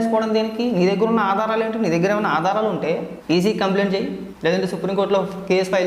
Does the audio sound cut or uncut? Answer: cut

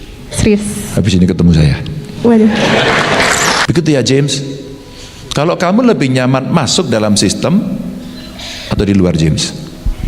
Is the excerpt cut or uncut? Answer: cut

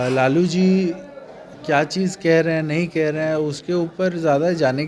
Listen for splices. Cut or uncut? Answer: uncut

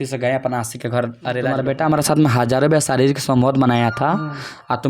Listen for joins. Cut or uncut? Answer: cut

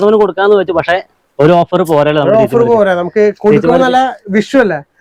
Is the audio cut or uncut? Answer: uncut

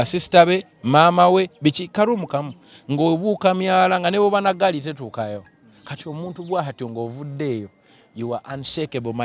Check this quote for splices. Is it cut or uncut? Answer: uncut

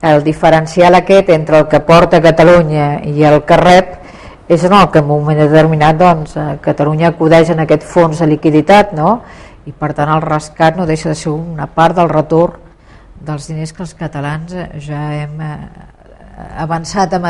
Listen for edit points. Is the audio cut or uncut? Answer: uncut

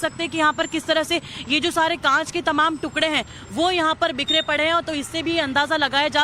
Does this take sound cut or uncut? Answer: cut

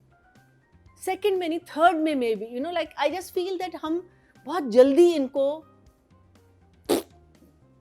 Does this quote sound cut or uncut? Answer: uncut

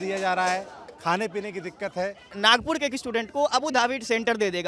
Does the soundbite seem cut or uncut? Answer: cut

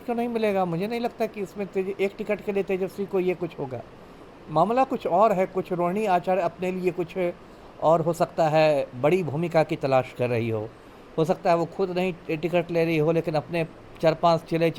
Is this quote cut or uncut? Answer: uncut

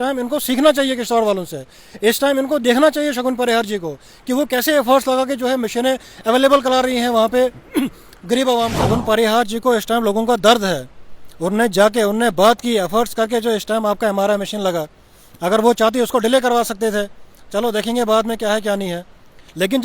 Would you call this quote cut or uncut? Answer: cut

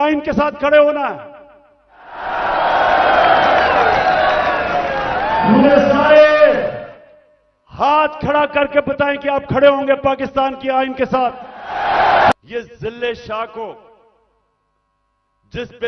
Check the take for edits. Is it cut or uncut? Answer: cut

